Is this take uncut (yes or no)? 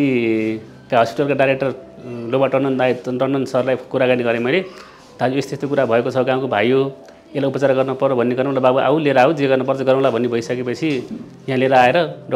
yes